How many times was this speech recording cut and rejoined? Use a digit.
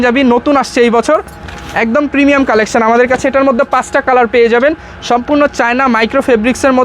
0